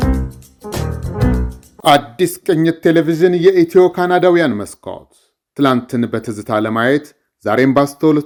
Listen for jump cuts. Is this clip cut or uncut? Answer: uncut